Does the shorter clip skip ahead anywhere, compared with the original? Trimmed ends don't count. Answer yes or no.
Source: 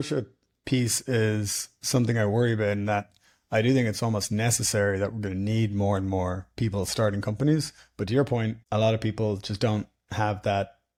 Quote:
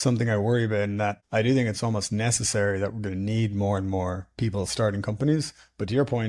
yes